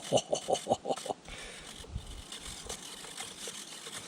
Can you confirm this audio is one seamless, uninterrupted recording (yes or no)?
yes